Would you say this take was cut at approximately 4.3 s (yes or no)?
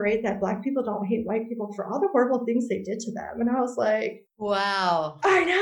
yes